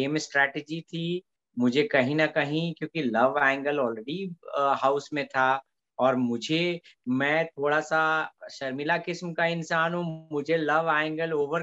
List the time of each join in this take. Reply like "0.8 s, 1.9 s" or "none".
none